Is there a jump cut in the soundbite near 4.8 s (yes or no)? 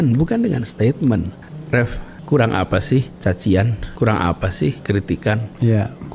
yes